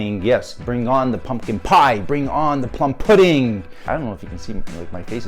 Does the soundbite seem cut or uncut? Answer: cut